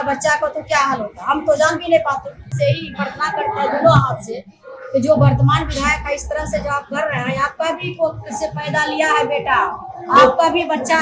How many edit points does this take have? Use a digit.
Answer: 1